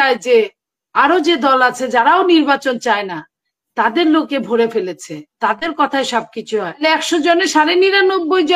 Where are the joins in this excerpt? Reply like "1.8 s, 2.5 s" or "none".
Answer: 6.8 s